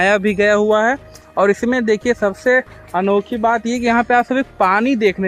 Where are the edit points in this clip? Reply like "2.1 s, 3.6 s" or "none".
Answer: none

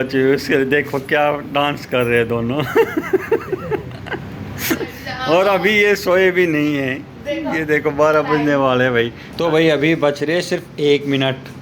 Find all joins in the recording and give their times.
4.9 s, 9.2 s

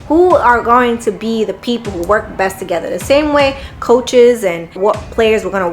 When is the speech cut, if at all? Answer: 4.8 s

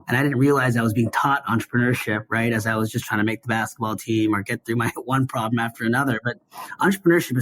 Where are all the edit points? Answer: none

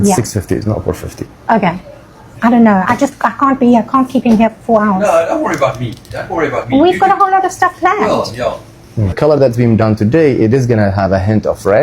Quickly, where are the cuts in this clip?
2.3 s, 9.2 s

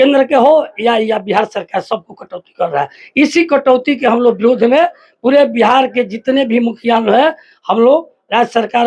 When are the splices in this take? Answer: none

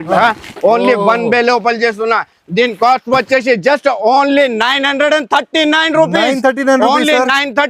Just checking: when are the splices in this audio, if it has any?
none

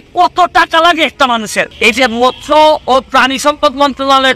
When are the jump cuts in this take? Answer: 1.7 s

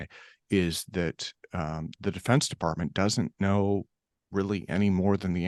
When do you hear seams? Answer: none

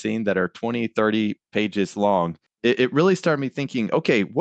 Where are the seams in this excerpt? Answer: 2.4 s

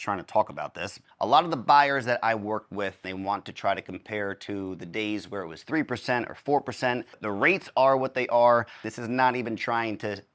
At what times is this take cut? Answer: 1.0 s, 3.0 s, 7.1 s, 8.9 s

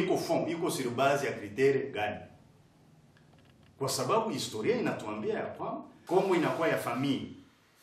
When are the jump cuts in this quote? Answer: 5.9 s

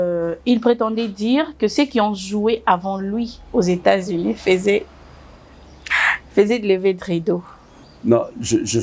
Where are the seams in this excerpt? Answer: none

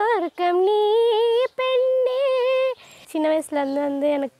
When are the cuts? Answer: 3.0 s

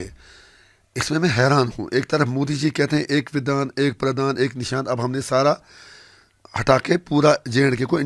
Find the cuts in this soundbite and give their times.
none

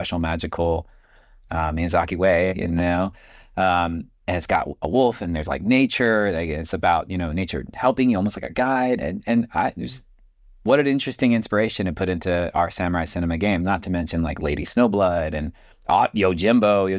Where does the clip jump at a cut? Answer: none

